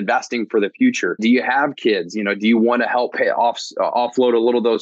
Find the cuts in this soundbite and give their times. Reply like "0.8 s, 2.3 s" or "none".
1.2 s, 3.1 s